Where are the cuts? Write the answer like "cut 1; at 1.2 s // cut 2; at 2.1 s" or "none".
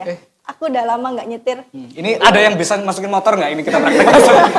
none

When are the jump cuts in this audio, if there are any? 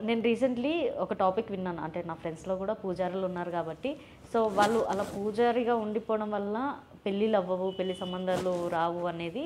none

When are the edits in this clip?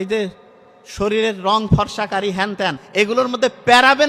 cut 1; at 2.8 s

